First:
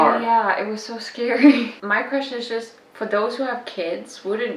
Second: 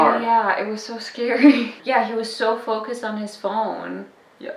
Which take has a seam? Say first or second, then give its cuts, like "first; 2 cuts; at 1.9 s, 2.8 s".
first; 1 cut; at 1.8 s